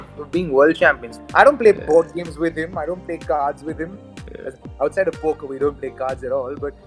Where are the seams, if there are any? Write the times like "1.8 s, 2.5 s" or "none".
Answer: 1.1 s